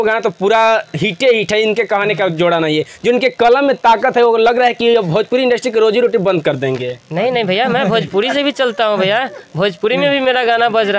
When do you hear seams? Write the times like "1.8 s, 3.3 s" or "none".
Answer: none

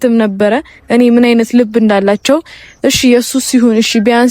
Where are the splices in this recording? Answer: none

